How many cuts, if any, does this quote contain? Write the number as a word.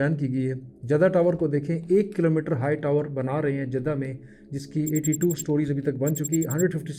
zero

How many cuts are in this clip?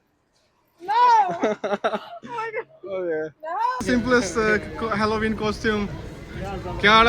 one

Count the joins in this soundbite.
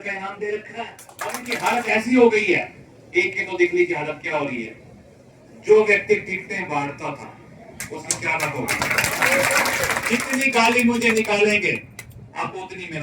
two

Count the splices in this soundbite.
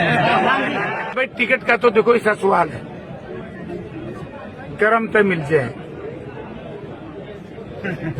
one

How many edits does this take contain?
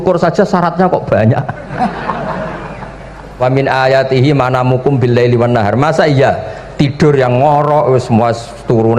one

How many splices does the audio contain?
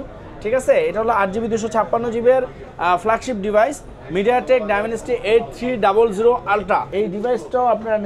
one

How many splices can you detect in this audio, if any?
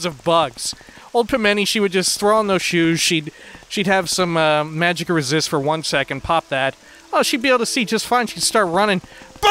zero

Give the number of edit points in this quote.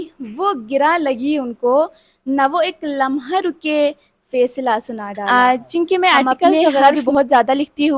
one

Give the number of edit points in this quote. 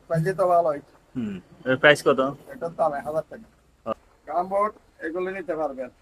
one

